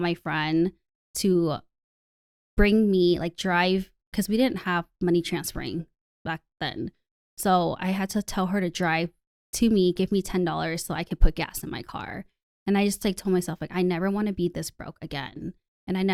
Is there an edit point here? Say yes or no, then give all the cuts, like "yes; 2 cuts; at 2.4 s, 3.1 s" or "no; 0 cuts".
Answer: no; 0 cuts